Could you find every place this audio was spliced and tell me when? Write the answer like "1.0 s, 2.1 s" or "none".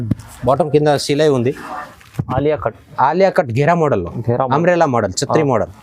1.8 s